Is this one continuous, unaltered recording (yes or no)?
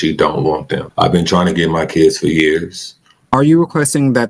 no